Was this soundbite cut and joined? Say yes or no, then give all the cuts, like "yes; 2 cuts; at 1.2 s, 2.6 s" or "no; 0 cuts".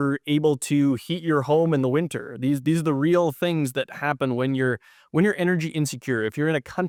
no; 0 cuts